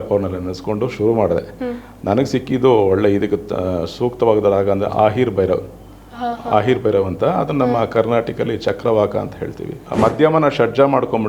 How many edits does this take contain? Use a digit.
1